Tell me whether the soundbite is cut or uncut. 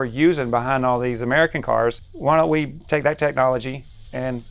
cut